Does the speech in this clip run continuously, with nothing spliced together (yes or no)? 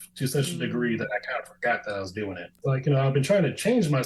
no